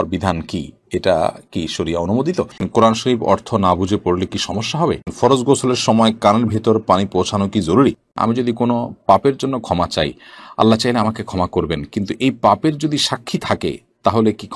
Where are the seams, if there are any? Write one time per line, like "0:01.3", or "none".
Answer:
0:02.7
0:05.1
0:08.1